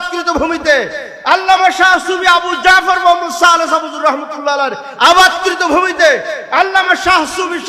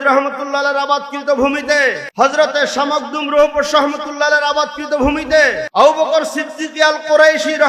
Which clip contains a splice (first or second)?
second